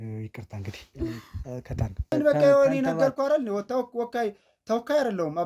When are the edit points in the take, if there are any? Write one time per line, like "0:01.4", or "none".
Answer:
0:02.1